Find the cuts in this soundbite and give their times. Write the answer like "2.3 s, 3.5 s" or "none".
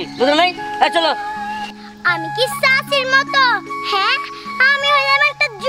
1.7 s

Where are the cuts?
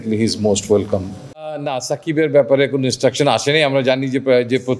1.6 s

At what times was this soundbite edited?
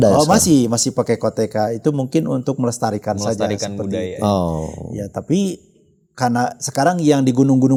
none

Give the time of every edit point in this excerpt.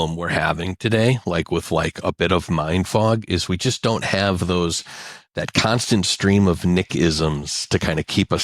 none

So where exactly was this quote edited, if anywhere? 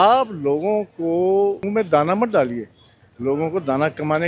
1.6 s

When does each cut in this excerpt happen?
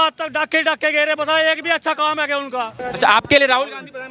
2.8 s

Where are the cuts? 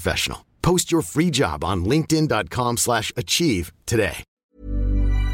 4.3 s

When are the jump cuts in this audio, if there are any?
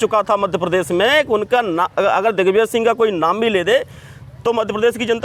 none

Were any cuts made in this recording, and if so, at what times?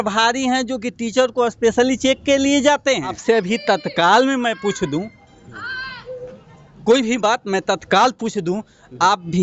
3.2 s

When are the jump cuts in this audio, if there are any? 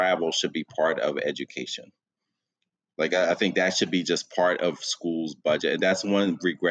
none

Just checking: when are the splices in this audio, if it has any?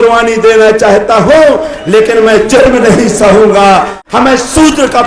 4.0 s

